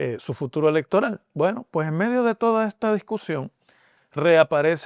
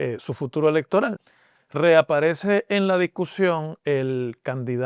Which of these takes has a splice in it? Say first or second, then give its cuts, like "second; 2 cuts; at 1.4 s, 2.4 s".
second; 1 cut; at 1.2 s